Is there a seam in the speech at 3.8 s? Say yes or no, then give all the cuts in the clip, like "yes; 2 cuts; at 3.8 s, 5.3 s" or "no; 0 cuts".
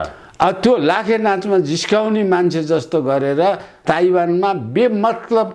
yes; 1 cut; at 3.8 s